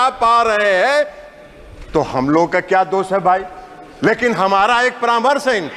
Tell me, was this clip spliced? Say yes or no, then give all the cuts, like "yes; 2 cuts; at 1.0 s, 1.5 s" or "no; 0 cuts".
no; 0 cuts